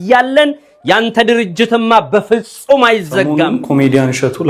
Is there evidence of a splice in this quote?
yes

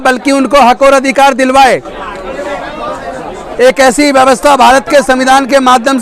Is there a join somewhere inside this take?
no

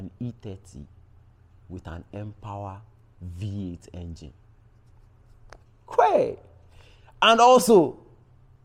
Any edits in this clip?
no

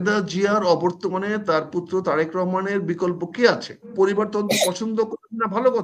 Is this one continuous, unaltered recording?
no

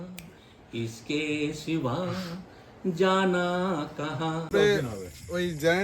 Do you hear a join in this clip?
yes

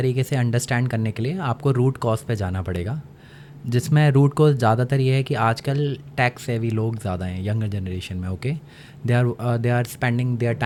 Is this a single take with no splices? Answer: yes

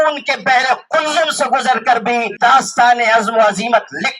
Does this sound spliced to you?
yes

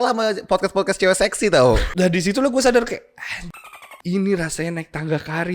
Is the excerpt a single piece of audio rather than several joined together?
no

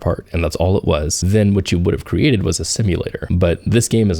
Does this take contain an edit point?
yes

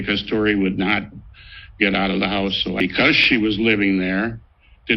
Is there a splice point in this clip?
yes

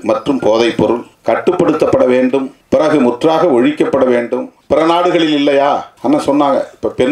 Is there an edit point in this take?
yes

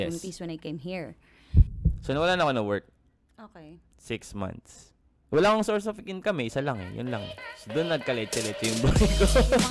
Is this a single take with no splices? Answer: no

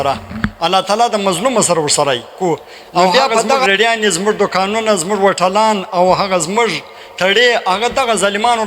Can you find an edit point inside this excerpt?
yes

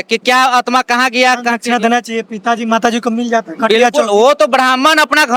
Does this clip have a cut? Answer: no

